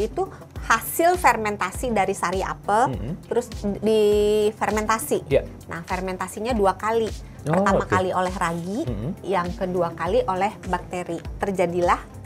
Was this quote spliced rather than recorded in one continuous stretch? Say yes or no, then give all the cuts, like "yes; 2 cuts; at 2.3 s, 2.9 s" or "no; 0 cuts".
yes; 2 cuts; at 3.2 s, 11.3 s